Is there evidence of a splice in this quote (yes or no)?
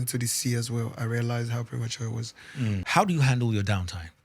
yes